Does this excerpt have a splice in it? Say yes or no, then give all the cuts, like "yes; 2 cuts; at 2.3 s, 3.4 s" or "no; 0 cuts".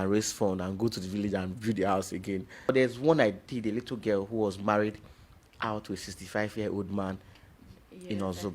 yes; 1 cut; at 2.7 s